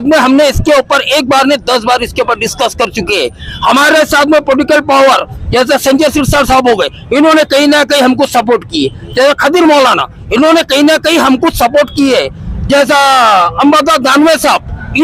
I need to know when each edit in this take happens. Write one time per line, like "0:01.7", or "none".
none

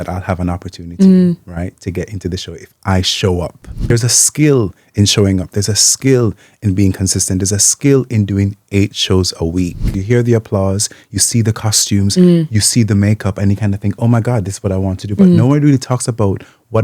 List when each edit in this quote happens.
0:03.9
0:09.9

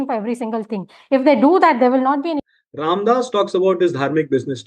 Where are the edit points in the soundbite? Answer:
0:02.3

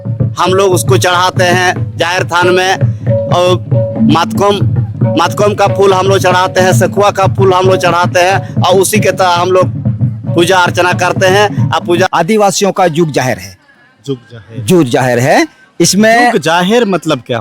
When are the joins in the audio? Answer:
0:12.1

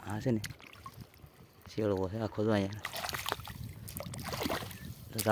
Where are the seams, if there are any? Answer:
none

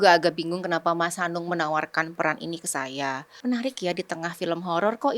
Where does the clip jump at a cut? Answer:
0:03.3

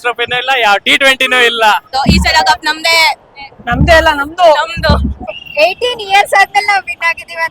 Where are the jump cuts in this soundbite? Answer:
0:01.9
0:05.2

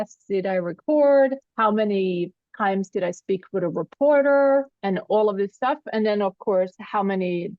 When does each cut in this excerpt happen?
0:02.4

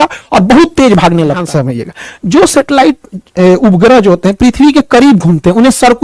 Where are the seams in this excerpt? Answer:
0:01.4

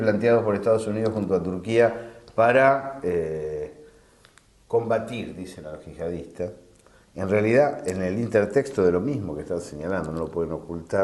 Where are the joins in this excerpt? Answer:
0:09.6

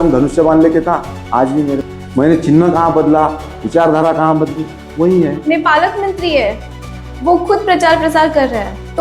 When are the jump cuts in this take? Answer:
0:01.8
0:05.4

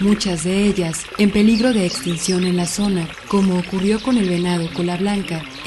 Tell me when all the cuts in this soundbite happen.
0:04.5

